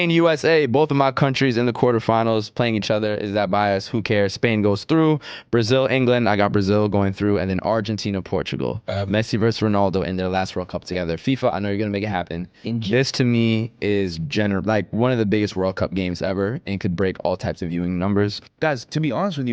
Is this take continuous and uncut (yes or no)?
no